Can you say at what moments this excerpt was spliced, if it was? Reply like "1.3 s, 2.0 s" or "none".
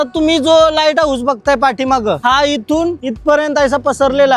none